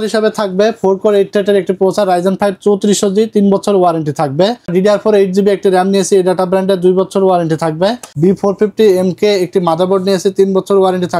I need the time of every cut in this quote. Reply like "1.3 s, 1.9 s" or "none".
4.7 s, 8.1 s